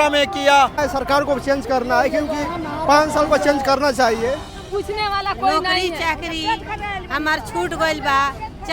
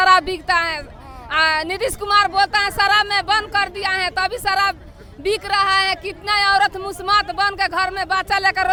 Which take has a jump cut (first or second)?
first